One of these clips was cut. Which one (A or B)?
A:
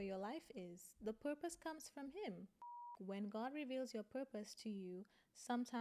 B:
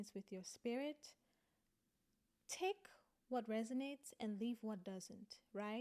A